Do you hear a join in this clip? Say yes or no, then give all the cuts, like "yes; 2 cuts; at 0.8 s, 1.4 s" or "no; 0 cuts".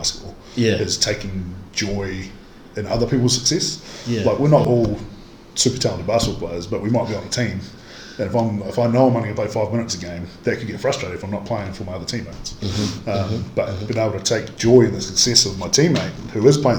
no; 0 cuts